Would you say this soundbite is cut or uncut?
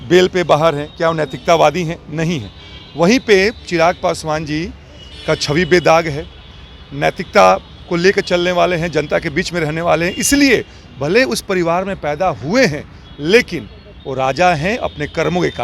uncut